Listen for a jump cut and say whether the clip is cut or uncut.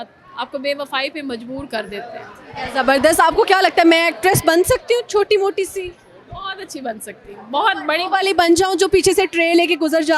uncut